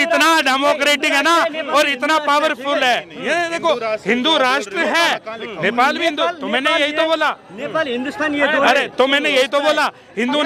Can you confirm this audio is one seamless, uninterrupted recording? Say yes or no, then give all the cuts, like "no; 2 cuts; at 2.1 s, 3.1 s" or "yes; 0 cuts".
yes; 0 cuts